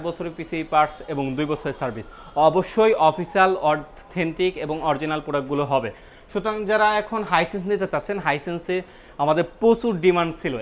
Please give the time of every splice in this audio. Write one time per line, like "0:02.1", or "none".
none